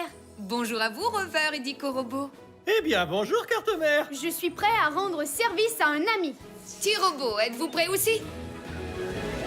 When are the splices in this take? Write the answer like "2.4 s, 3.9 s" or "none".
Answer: 8.3 s